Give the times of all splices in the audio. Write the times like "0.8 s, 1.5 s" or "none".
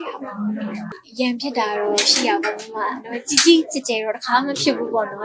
0.9 s